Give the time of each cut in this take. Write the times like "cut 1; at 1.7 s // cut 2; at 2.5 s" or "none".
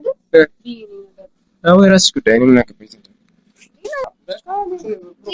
cut 1; at 4.0 s